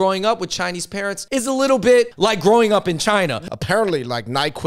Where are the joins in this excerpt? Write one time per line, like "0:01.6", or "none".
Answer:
0:01.2
0:02.1
0:03.4